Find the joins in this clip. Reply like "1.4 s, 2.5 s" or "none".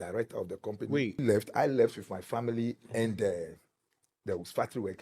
1.2 s